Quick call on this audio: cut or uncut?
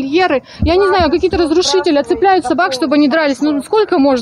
uncut